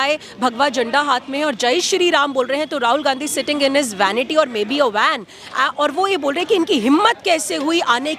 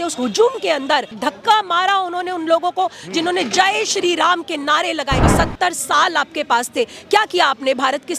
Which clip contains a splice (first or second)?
second